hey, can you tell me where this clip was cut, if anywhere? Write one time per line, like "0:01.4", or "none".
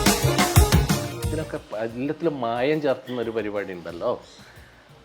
0:01.2